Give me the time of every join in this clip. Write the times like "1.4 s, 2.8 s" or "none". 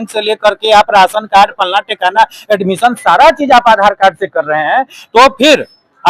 none